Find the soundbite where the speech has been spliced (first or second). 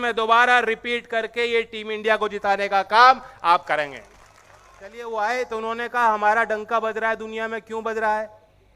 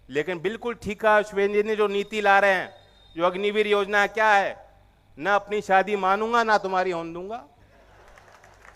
first